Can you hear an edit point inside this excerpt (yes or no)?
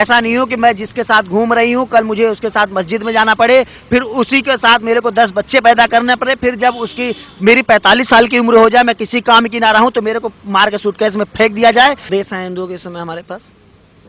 yes